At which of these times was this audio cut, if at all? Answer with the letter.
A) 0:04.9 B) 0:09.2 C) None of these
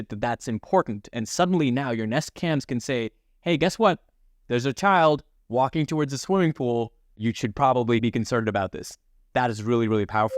B